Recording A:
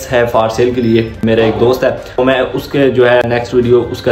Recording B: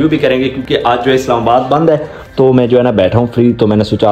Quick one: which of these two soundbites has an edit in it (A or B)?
A